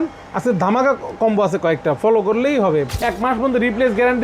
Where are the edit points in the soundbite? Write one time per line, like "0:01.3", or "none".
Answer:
0:02.9